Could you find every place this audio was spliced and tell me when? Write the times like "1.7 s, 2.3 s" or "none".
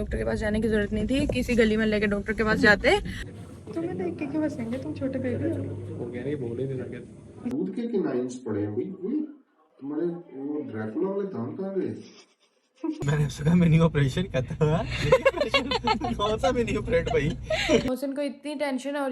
3.2 s, 7.5 s, 13.0 s, 17.9 s